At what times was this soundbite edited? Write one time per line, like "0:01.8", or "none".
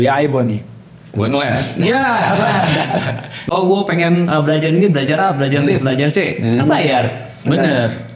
0:03.4